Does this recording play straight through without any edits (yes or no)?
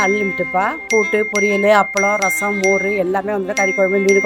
yes